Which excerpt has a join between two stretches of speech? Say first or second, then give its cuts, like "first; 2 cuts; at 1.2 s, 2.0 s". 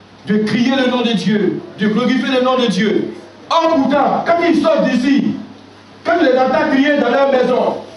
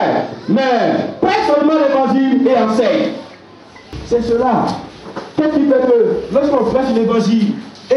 second; 1 cut; at 4.0 s